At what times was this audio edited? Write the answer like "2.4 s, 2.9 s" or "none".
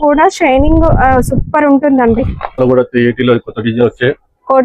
2.6 s